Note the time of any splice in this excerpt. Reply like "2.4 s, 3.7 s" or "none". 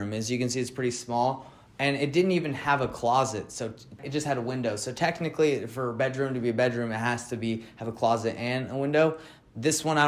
4.0 s